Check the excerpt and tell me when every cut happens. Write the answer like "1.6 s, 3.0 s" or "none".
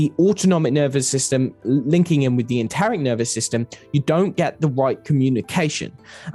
none